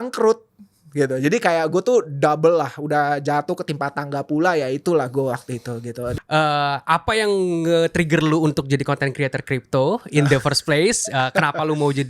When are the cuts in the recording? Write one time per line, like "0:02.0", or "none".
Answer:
0:06.1